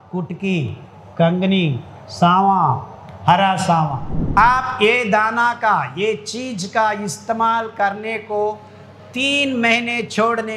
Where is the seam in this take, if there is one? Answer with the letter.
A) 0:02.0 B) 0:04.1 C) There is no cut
B